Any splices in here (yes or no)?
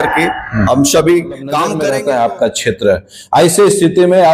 yes